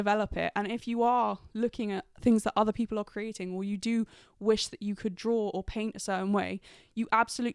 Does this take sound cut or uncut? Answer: uncut